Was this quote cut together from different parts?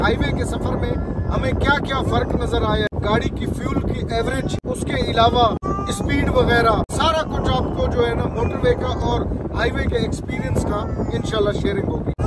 no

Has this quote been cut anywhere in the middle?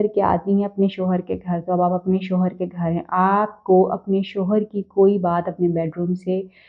no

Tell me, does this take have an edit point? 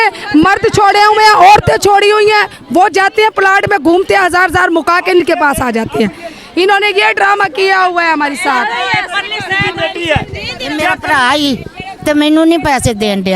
no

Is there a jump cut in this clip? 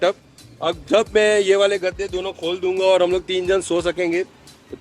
no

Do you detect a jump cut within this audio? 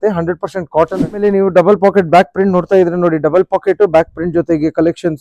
yes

